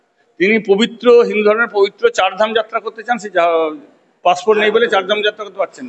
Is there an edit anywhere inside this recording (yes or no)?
no